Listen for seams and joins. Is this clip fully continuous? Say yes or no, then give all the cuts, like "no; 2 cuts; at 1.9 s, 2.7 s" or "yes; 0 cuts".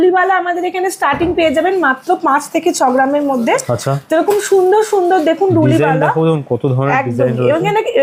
yes; 0 cuts